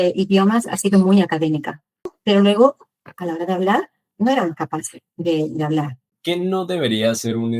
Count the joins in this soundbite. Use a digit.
2